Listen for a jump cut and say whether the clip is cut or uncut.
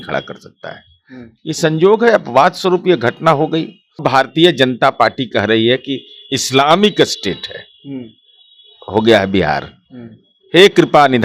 cut